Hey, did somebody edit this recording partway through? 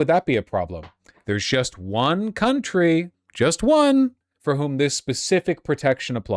yes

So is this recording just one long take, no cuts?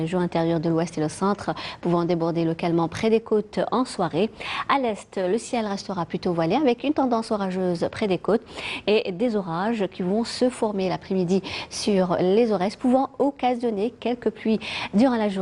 yes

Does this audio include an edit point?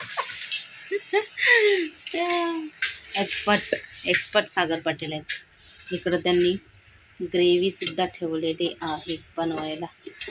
no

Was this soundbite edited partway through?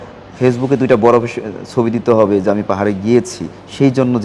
no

